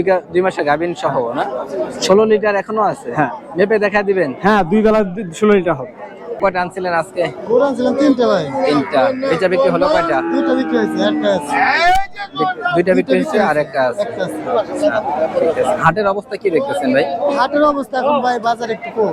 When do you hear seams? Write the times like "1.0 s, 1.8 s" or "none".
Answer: 6.4 s